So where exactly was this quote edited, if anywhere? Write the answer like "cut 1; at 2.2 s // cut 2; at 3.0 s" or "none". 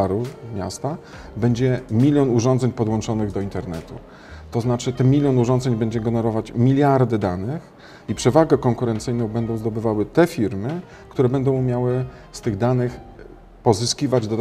none